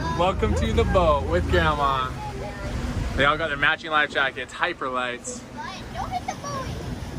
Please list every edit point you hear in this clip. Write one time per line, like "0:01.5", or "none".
none